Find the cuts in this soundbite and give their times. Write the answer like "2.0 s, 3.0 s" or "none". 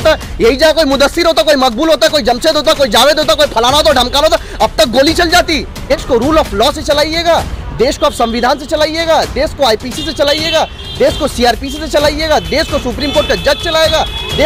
5.9 s